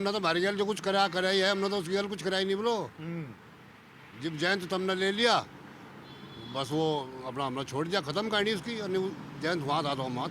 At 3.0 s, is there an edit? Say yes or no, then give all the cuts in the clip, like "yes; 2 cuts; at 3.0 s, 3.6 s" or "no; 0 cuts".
no; 0 cuts